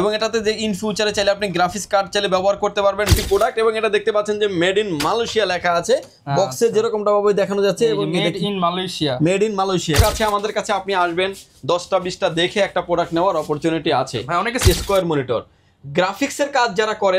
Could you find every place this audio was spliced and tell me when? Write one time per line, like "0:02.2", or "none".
0:03.2
0:10.0
0:14.6